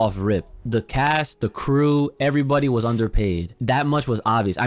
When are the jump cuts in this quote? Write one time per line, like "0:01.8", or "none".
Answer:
0:03.5